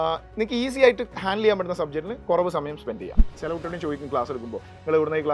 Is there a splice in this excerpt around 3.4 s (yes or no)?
yes